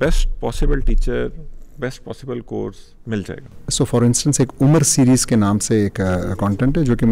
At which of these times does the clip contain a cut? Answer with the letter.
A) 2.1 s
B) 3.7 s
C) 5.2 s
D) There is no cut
B